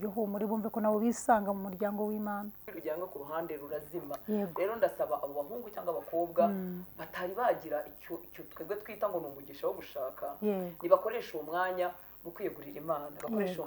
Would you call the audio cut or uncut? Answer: cut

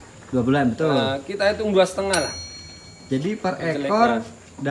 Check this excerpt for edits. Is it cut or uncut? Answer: uncut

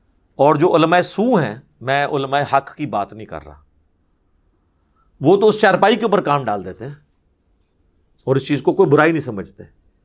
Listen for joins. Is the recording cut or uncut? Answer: uncut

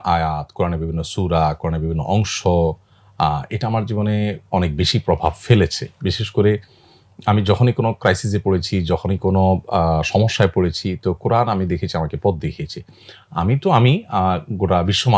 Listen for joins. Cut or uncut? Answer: uncut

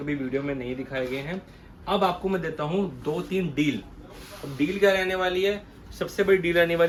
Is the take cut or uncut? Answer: uncut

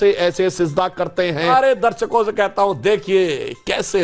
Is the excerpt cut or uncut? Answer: cut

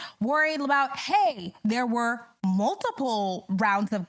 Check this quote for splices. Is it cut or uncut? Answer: uncut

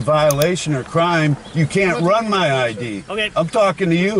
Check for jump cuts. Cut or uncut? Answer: uncut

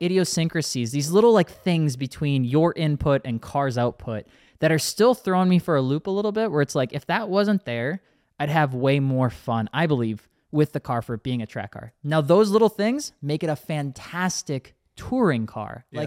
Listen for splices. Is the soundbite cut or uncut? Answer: uncut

